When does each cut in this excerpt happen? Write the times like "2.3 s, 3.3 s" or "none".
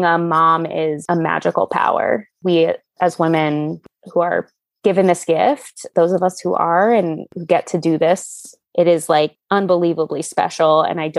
2.3 s, 3.8 s, 7.3 s, 8.6 s